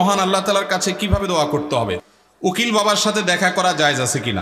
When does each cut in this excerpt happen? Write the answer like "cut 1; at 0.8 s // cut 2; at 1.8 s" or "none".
cut 1; at 2.0 s